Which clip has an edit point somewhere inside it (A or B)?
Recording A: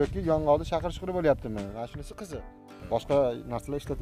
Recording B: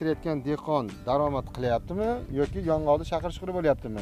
A